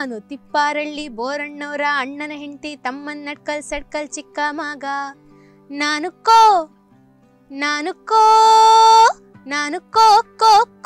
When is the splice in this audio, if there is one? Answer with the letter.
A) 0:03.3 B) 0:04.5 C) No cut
C